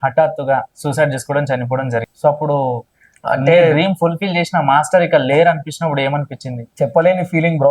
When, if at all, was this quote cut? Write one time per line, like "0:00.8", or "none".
0:02.1
0:06.6